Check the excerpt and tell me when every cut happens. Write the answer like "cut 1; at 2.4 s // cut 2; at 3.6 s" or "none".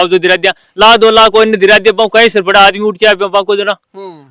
none